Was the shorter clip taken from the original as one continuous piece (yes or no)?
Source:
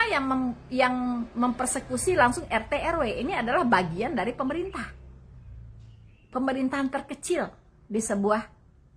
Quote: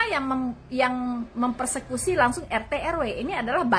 yes